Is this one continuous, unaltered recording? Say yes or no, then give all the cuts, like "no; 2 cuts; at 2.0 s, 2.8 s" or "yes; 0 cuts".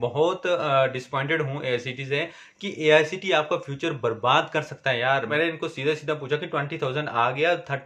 no; 1 cut; at 5.3 s